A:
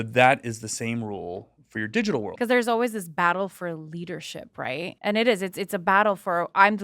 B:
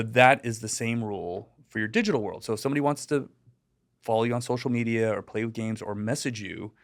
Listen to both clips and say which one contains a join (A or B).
A